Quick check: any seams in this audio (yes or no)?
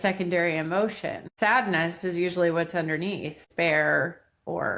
yes